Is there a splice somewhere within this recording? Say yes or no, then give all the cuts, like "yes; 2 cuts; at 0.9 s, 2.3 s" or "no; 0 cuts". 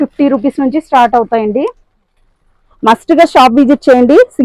no; 0 cuts